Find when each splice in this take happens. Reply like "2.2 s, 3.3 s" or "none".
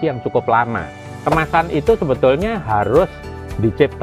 1.1 s